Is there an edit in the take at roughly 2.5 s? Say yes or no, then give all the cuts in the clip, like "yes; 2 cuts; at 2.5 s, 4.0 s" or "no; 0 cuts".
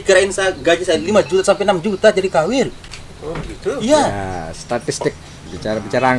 no; 0 cuts